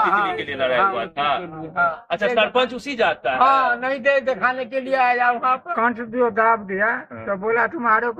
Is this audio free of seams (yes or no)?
no